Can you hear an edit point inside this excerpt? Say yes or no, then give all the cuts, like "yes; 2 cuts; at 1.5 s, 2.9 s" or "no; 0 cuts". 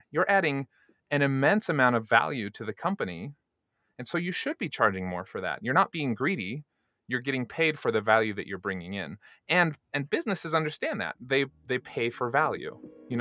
no; 0 cuts